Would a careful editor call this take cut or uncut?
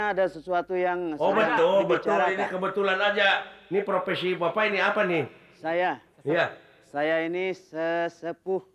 uncut